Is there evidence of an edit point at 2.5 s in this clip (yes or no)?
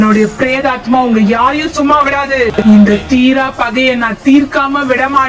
yes